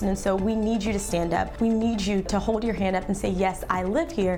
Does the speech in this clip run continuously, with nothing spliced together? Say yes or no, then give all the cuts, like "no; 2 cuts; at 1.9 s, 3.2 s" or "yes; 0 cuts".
yes; 0 cuts